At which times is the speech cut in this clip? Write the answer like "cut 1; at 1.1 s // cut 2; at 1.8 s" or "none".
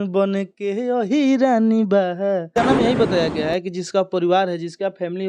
cut 1; at 2.5 s